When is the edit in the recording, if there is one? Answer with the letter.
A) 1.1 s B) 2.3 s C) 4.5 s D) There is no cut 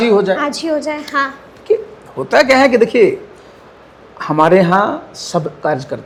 D